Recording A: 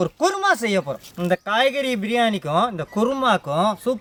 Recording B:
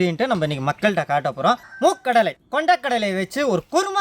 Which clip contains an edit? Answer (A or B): B